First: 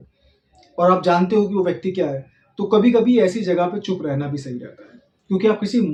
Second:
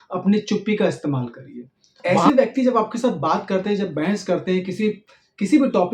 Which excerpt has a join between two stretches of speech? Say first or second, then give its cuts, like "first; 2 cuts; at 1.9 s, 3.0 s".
second; 1 cut; at 2.1 s